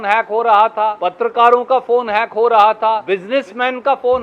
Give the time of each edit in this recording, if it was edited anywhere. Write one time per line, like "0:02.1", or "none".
0:01.0
0:03.0